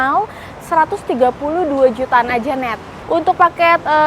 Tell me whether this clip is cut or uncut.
cut